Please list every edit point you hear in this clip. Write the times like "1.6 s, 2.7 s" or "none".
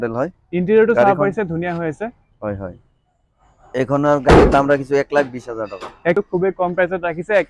3.7 s, 6.1 s